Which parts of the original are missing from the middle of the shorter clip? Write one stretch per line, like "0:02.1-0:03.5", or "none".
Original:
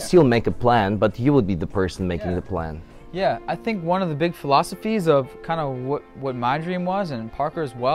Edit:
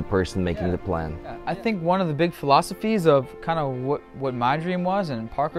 0:03.0-0:03.4